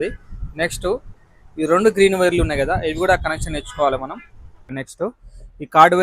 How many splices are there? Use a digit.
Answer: 1